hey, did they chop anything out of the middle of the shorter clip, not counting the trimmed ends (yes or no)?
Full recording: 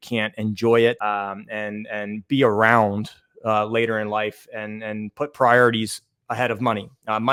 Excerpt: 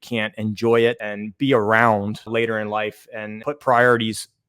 yes